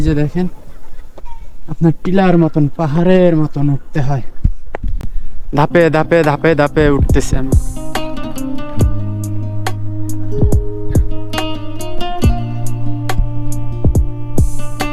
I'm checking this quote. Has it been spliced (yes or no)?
no